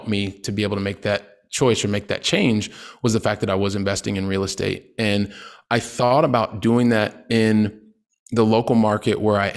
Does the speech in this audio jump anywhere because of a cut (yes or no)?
no